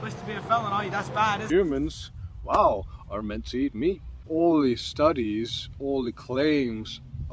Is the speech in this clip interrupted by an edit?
yes; 1 cut; at 1.4 s

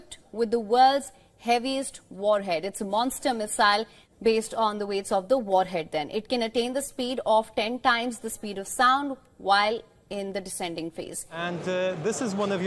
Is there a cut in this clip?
yes; 2 cuts; at 4.0 s, 11.3 s

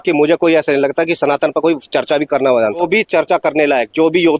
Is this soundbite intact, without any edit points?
no; 1 cut; at 2.8 s

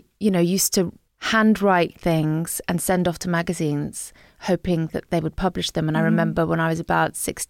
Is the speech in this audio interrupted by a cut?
yes; 1 cut; at 1.0 s

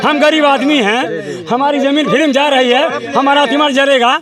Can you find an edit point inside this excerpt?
no; 0 cuts

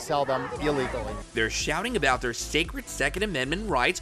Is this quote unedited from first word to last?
yes; 0 cuts

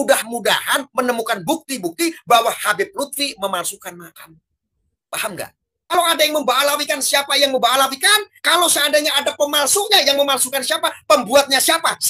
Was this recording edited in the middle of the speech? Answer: yes; 1 cut; at 5.9 s

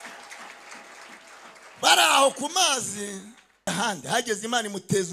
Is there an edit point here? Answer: yes; 1 cut; at 3.7 s

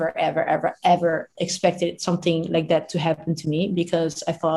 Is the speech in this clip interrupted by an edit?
no; 0 cuts

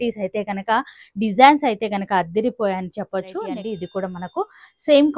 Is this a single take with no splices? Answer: no; 1 cut; at 3.4 s

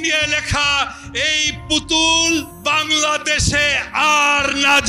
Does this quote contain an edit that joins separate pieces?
yes; 1 cut; at 2.5 s

